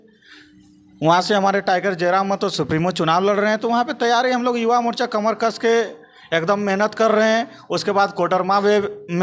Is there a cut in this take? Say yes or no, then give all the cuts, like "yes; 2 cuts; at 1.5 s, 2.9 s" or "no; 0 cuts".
no; 0 cuts